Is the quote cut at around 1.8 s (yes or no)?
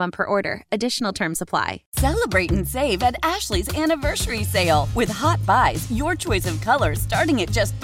yes